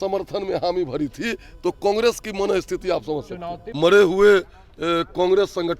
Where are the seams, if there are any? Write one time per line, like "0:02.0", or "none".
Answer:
0:03.6